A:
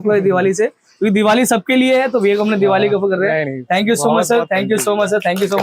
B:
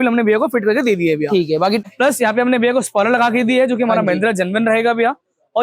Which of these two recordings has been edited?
B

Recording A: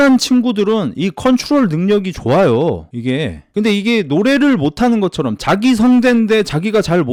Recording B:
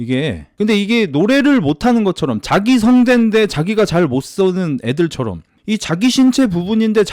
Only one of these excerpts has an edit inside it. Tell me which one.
B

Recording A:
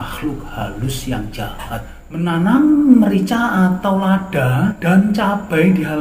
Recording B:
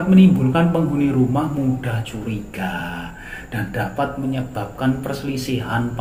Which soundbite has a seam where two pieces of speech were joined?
A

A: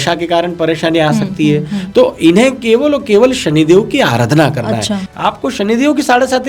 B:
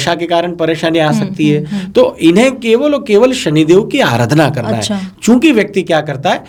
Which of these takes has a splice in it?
A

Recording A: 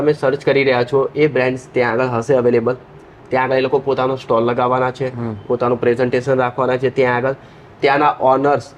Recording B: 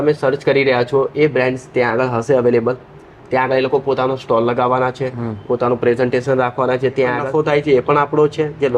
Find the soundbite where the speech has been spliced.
B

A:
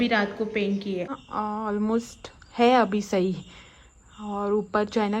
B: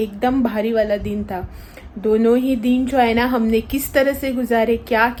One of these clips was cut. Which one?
A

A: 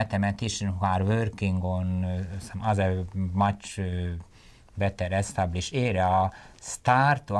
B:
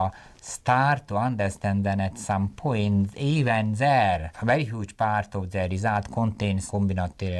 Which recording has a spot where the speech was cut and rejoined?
B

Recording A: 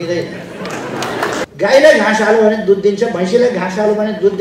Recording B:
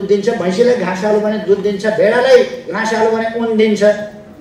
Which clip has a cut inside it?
A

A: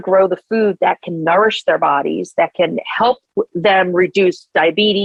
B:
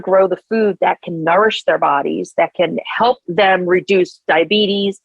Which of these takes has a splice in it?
B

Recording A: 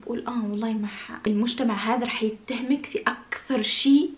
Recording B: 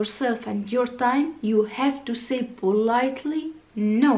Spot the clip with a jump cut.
A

